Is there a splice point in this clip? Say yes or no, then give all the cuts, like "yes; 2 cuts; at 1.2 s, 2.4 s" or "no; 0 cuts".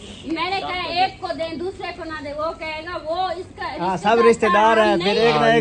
no; 0 cuts